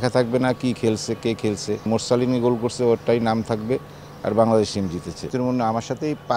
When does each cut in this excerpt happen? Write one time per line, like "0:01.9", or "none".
0:01.8
0:05.3